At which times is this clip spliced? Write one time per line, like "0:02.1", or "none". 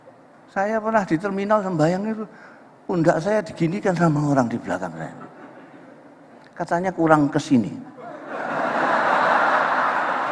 none